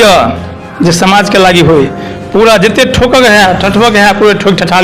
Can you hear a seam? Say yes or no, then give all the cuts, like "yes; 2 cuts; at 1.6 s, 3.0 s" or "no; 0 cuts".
no; 0 cuts